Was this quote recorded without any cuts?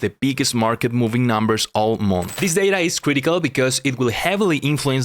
no; 1 cut; at 2.3 s

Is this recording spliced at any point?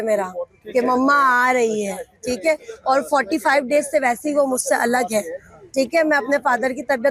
no; 0 cuts

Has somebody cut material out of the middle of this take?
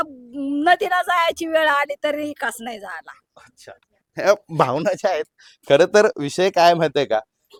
no; 0 cuts

